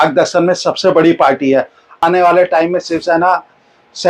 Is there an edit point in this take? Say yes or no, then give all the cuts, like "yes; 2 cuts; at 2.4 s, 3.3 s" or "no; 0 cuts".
yes; 1 cut; at 2.0 s